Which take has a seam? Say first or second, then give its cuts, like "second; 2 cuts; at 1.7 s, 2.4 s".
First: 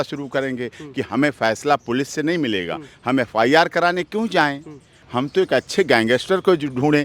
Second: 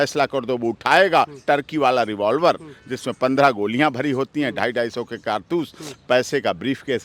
first; 1 cut; at 5.0 s